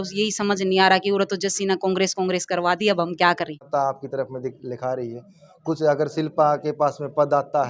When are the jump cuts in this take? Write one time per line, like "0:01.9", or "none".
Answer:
0:03.5